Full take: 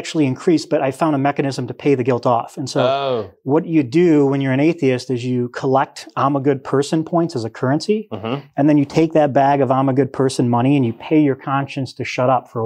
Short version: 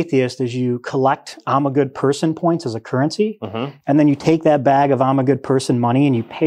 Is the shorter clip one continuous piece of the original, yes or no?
yes